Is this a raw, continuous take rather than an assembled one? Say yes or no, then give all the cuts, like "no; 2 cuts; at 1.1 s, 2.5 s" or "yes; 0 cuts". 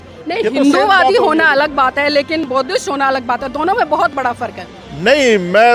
yes; 0 cuts